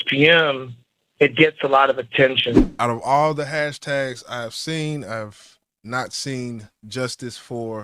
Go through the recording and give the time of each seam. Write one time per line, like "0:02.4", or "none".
0:02.7